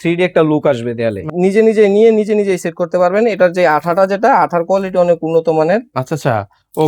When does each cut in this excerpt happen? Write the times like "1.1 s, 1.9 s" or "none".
1.3 s